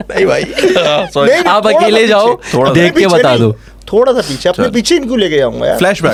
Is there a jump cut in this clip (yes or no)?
no